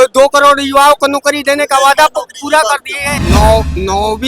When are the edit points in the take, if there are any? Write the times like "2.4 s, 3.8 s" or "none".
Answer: 3.2 s

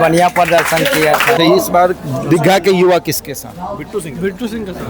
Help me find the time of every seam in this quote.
1.4 s

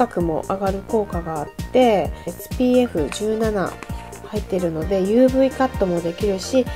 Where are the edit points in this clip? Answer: 2.4 s

